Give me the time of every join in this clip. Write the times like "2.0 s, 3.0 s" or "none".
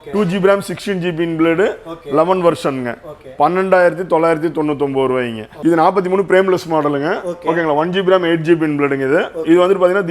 5.4 s